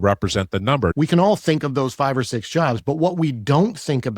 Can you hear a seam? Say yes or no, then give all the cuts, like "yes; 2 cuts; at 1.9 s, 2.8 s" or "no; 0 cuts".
yes; 1 cut; at 0.9 s